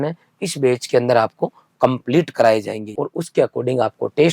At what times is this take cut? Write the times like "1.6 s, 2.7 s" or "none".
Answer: 2.9 s